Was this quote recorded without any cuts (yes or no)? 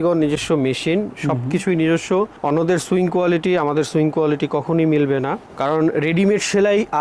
yes